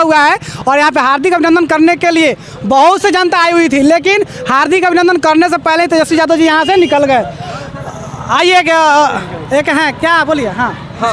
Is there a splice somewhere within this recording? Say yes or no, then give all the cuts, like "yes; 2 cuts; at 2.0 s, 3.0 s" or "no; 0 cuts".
no; 0 cuts